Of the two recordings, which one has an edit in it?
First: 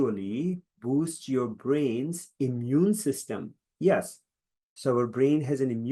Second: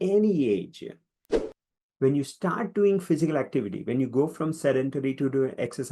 second; 1 cut; at 1.4 s

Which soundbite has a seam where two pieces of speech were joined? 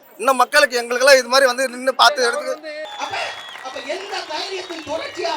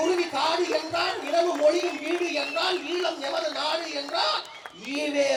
first; 1 cut; at 2.8 s

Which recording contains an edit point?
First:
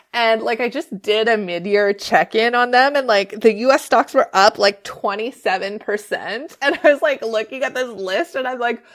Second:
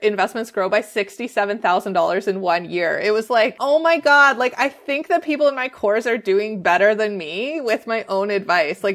second; 1 cut; at 3.6 s

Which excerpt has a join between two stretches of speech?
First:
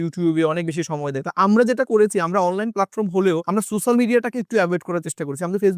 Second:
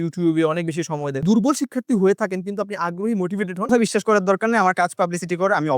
second; 2 cuts; at 1.2 s, 3.7 s

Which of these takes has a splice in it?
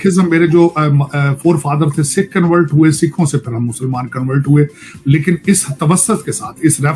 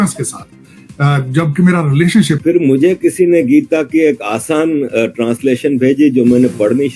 second; 1 cut; at 2.4 s

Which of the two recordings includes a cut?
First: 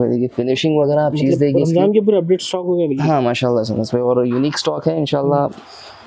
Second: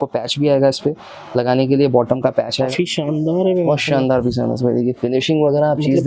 second; 1 cut; at 2.7 s

